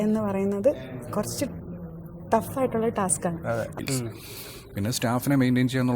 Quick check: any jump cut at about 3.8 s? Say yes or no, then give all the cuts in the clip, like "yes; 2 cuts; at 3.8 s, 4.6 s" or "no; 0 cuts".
yes; 1 cut; at 3.8 s